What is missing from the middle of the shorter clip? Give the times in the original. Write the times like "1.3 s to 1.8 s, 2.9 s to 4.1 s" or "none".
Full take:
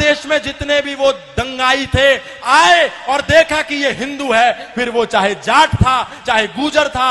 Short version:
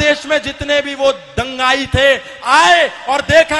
none